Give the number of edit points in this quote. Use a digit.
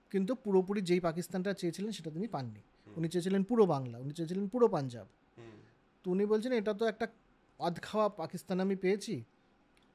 0